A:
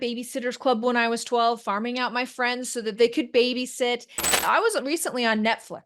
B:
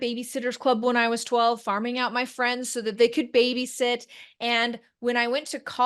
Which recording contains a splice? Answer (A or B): A